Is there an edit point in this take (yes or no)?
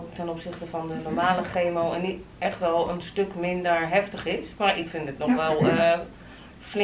no